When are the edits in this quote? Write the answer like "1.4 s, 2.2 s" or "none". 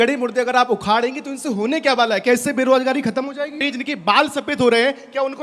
3.7 s